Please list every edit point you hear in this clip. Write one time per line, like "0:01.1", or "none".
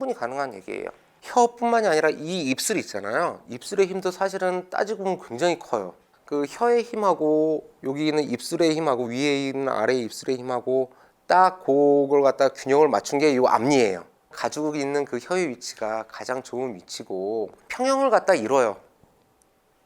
0:01.1